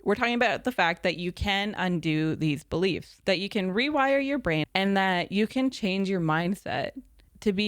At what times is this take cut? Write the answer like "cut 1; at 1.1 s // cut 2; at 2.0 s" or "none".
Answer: cut 1; at 3.1 s // cut 2; at 4.6 s